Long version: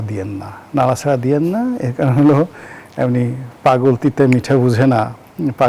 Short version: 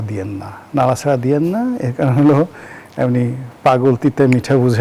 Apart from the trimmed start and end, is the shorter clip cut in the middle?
no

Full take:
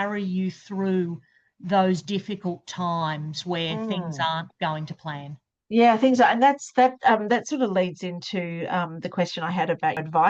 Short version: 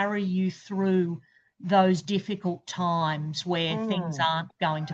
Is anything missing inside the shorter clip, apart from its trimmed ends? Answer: no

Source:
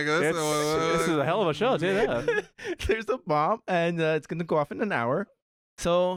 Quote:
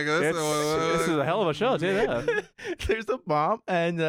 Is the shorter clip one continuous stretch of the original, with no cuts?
yes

